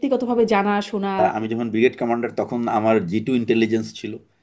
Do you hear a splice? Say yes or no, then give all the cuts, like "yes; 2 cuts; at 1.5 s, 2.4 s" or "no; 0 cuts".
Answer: yes; 1 cut; at 1.2 s